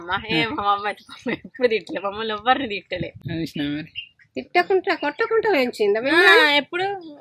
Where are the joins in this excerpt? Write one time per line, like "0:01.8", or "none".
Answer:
none

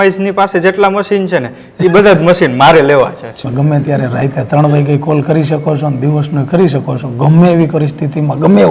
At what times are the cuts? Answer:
0:03.3

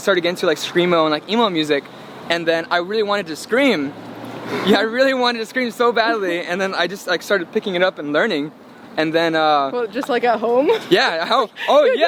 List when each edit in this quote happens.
none

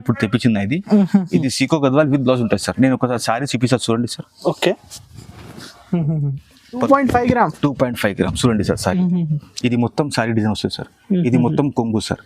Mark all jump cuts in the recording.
0:06.8

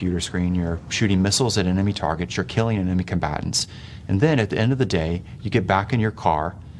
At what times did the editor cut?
none

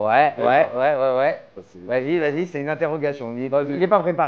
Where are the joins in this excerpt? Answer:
none

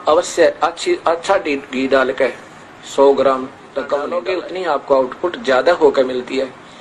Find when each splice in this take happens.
0:04.1

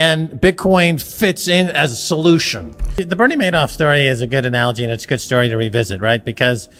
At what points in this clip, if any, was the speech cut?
none

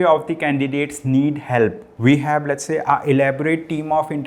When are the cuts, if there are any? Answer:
0:01.9

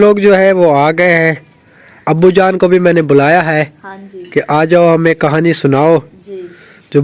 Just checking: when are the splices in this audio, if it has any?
none

